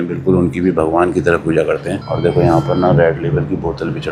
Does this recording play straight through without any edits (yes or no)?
yes